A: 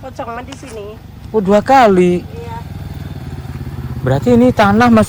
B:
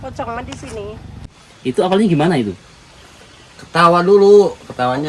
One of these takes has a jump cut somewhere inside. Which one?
B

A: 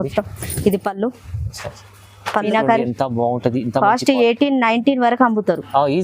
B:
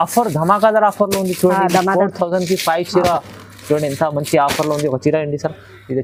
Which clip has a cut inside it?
A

